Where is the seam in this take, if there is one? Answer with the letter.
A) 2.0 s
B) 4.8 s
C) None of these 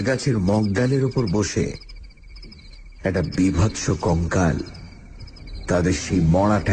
C